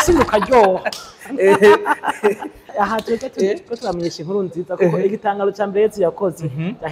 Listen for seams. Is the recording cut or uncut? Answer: cut